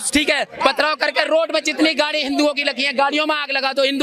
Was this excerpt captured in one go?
yes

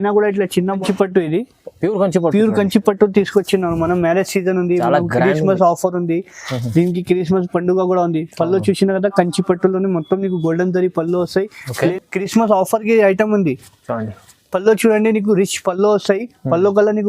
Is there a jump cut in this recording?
yes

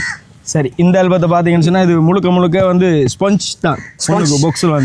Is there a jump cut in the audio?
no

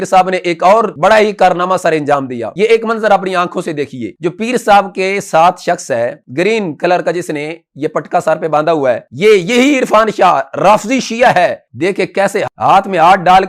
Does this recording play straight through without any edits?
no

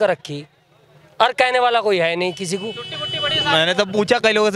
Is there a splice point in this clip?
no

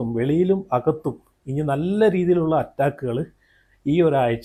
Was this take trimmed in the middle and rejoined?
no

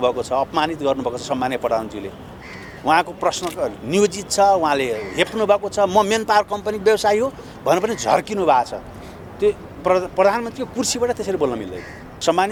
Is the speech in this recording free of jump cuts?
yes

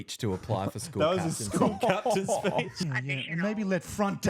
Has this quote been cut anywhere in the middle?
yes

